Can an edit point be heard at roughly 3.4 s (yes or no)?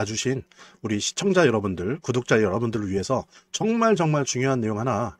no